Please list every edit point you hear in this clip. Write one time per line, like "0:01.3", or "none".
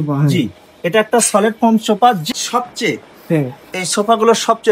0:02.2